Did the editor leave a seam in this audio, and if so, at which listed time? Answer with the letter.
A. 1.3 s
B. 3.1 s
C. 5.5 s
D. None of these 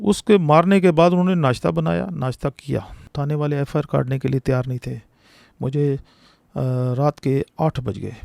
B